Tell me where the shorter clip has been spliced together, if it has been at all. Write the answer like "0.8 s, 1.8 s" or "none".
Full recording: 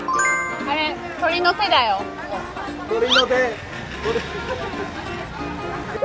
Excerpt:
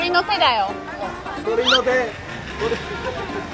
1.3 s